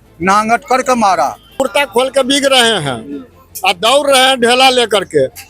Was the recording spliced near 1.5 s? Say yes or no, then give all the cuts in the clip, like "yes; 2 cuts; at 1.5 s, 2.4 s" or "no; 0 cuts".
yes; 1 cut; at 1.5 s